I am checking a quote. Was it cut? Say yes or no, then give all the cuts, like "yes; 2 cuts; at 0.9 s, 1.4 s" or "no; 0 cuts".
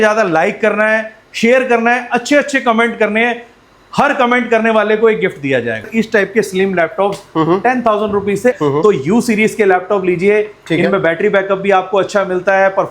yes; 2 cuts; at 5.9 s, 8.6 s